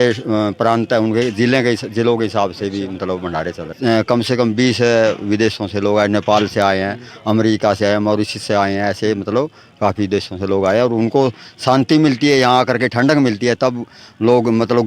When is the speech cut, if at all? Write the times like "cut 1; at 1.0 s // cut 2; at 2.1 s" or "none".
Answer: cut 1; at 3.8 s